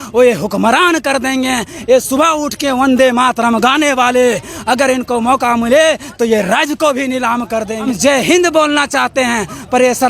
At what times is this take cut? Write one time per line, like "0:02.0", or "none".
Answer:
0:07.8